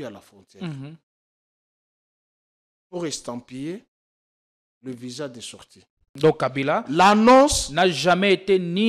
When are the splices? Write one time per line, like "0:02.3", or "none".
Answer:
0:06.1